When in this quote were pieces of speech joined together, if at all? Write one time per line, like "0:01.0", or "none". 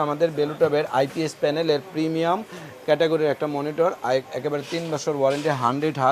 none